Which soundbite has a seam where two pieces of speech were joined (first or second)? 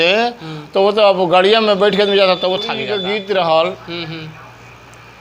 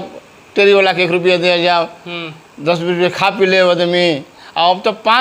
first